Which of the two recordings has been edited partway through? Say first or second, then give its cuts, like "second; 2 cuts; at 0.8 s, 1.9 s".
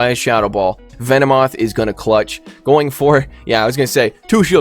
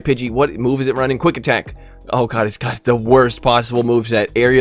first; 1 cut; at 0.9 s